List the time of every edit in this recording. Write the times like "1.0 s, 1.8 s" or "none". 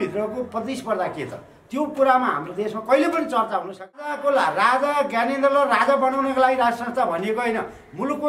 4.1 s